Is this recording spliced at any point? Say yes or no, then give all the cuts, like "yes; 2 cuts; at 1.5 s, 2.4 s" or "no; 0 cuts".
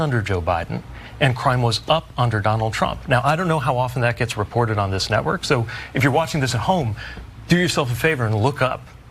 no; 0 cuts